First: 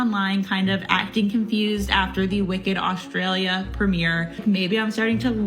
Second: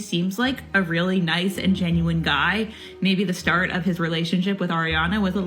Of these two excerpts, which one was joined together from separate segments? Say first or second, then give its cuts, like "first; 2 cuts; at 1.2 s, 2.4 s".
first; 1 cut; at 4.4 s